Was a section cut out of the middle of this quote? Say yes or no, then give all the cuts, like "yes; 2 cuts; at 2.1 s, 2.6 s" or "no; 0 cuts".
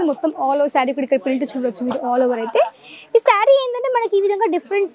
no; 0 cuts